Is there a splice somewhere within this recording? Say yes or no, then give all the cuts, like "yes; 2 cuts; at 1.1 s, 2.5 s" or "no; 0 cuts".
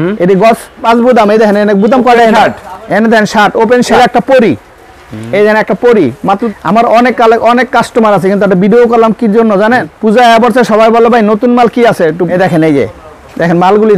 yes; 5 cuts; at 0.8 s, 3.9 s, 6.4 s, 9.9 s, 12.3 s